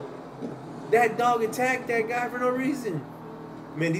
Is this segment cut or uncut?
uncut